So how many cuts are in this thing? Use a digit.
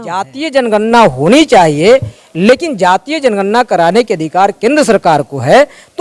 0